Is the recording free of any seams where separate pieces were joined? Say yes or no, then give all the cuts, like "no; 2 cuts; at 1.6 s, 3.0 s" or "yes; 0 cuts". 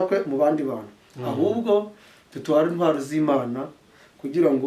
yes; 0 cuts